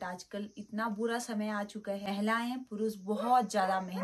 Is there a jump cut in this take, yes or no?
no